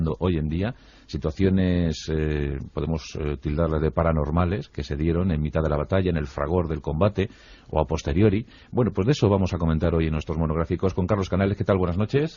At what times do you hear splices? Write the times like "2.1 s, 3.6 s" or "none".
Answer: 3.3 s